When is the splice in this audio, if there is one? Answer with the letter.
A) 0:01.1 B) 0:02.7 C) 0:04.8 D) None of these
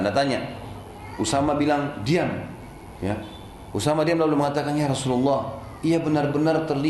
D